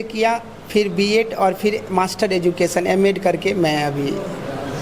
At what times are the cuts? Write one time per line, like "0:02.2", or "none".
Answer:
none